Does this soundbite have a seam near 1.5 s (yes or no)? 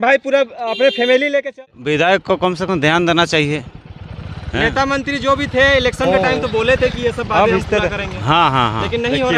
yes